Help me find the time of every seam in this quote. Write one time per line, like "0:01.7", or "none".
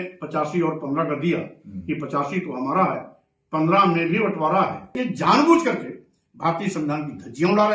0:05.0